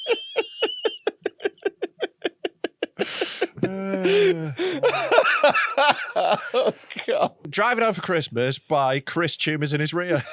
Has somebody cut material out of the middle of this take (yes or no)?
yes